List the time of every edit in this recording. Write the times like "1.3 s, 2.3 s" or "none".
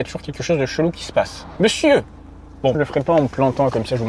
1.4 s, 2.8 s